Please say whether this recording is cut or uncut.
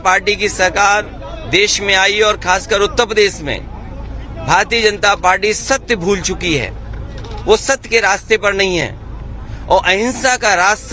uncut